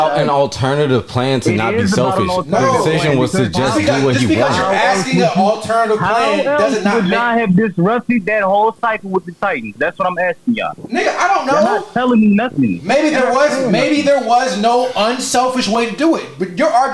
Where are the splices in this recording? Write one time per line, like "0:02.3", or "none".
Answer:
none